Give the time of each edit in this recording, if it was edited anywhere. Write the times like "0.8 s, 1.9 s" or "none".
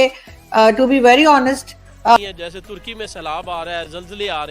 2.2 s